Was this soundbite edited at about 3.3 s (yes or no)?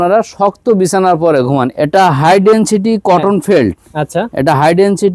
no